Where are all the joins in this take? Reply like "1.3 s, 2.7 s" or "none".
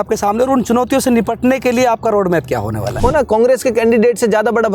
3.0 s